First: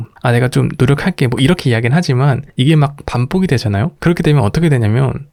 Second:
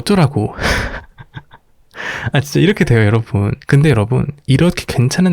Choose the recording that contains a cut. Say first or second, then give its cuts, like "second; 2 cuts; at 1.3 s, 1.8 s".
second; 1 cut; at 3.6 s